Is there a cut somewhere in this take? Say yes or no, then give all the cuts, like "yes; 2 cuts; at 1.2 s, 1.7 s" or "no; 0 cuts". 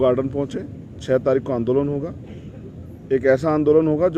no; 0 cuts